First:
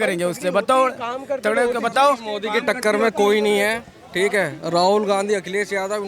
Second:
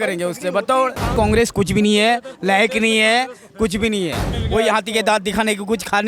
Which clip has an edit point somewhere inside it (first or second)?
second